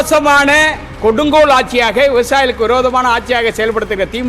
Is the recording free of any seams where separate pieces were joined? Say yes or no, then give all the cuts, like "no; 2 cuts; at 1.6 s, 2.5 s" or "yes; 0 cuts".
yes; 0 cuts